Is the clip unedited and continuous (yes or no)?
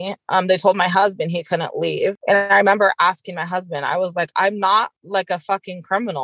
no